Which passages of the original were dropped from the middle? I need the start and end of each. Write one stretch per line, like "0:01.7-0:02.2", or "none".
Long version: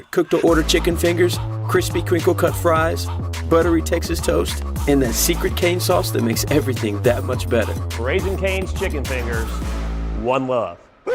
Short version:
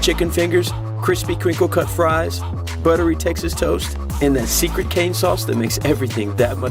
none